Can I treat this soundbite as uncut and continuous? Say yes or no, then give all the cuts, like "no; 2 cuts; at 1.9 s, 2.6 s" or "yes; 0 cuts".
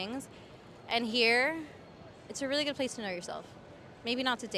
yes; 0 cuts